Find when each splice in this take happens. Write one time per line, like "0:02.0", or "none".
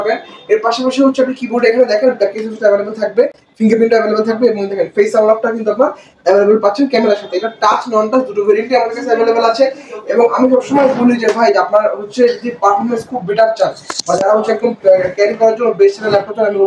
none